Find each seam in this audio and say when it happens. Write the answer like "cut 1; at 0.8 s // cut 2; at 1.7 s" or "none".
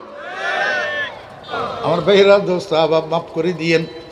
cut 1; at 1.5 s